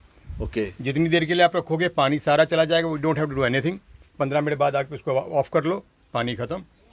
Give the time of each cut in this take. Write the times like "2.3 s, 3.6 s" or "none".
none